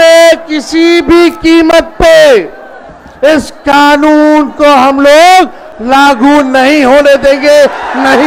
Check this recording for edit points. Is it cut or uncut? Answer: uncut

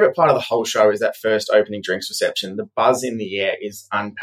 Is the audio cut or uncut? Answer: uncut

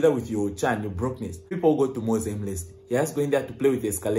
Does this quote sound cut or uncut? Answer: cut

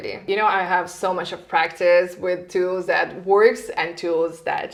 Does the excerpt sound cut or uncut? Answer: uncut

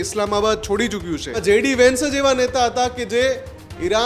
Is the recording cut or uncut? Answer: cut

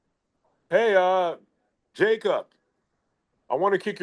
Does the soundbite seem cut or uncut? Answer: uncut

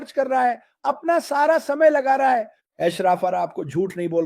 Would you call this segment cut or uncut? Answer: cut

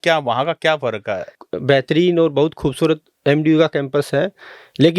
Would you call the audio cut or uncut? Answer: cut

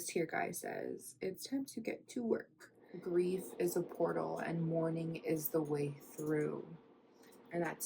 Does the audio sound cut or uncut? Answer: cut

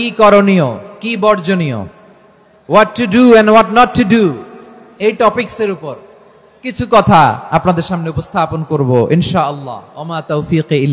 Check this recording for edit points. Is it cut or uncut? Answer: uncut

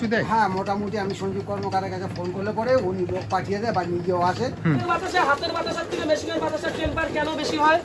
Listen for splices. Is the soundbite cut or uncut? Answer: cut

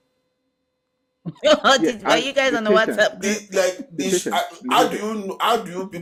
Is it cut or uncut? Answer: uncut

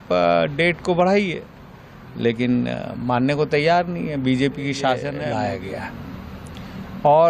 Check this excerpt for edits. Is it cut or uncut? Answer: cut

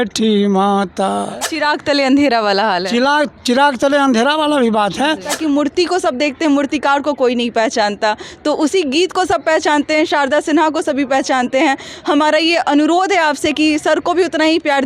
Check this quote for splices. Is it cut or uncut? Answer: cut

